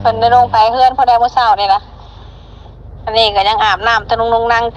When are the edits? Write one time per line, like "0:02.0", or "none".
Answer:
none